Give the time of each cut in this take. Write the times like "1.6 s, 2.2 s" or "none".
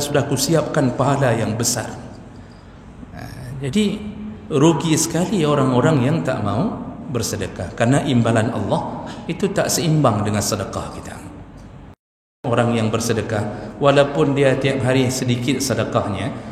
12.4 s